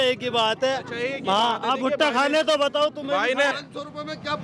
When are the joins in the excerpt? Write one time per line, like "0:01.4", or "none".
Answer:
0:03.5